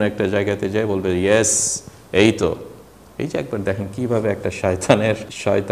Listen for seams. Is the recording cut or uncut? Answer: uncut